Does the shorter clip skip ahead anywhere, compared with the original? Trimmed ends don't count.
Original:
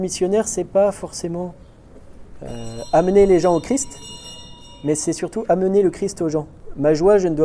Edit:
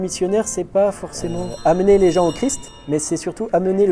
yes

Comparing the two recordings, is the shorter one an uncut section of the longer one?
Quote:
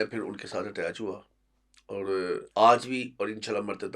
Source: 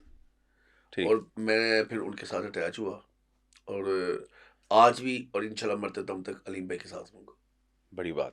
no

